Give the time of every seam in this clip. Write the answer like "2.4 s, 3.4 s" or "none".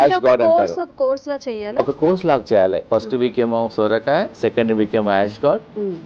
2.8 s, 4.3 s